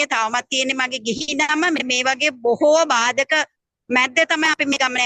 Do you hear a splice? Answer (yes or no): no